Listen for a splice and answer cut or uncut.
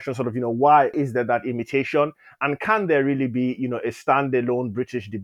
cut